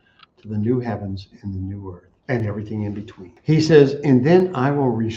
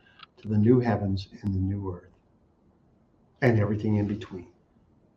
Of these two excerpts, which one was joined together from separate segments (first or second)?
first